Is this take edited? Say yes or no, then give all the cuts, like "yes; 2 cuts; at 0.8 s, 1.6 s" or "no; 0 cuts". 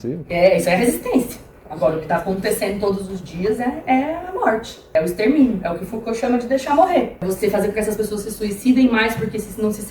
yes; 2 cuts; at 4.8 s, 7.2 s